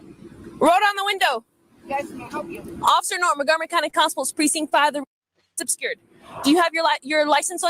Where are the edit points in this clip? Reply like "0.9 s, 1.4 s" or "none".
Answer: 5.7 s